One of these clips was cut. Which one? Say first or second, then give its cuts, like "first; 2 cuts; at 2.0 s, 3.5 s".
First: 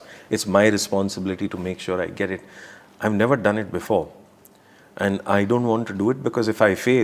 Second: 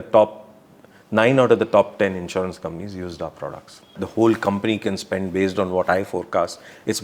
second; 1 cut; at 4.0 s